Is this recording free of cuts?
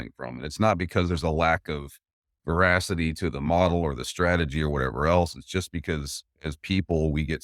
yes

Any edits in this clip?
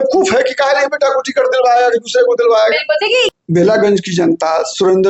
yes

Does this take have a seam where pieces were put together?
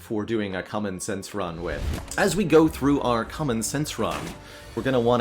yes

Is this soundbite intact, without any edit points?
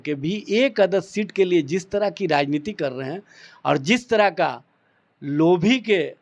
yes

